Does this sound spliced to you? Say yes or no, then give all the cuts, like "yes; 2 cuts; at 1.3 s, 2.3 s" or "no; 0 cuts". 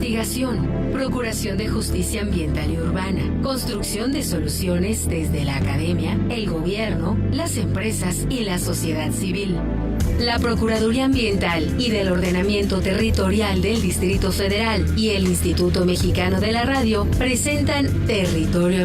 no; 0 cuts